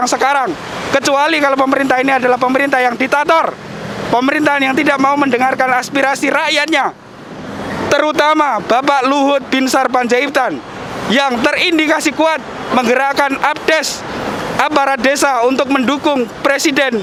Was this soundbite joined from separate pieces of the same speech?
no; 0 cuts

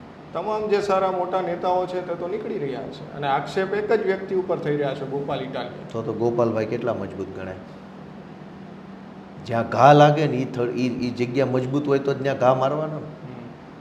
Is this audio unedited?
yes; 0 cuts

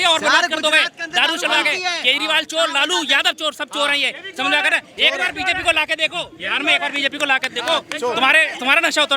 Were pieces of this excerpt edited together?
no; 0 cuts

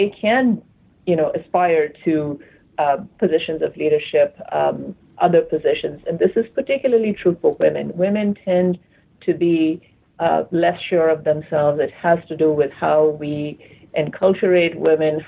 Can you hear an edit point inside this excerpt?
no; 0 cuts

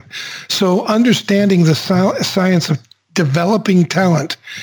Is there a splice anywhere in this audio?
no; 0 cuts

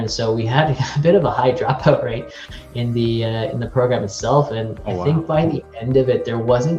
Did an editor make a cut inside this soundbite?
no; 0 cuts

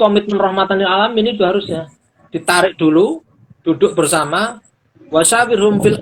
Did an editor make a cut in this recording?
no; 0 cuts

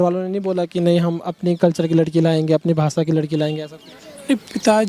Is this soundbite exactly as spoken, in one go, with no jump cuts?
yes; 0 cuts

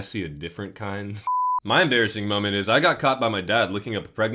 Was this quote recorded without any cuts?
no; 1 cut; at 1.3 s

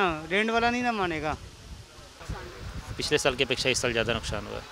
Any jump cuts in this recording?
yes; 1 cut; at 2.2 s

